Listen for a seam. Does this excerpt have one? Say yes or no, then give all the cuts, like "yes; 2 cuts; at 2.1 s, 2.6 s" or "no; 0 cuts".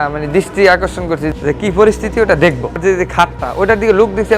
yes; 2 cuts; at 1.3 s, 2.8 s